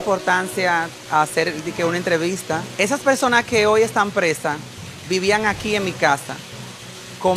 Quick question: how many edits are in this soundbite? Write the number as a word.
one